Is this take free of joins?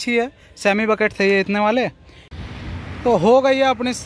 no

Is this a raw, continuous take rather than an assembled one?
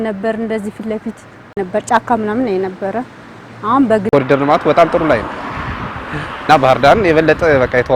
no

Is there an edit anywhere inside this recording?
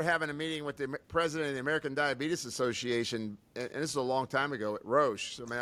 no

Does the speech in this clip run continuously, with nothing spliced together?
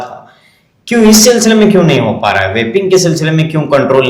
yes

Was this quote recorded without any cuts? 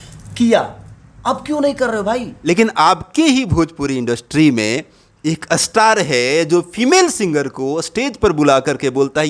no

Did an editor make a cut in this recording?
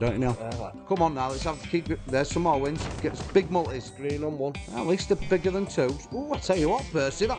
no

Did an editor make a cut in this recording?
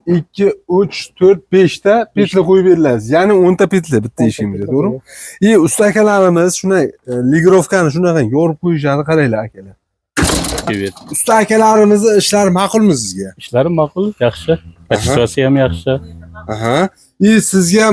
yes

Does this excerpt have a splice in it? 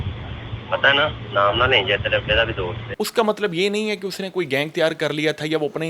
yes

